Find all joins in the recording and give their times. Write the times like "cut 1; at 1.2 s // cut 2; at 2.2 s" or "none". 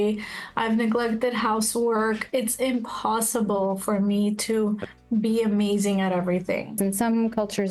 cut 1; at 6.8 s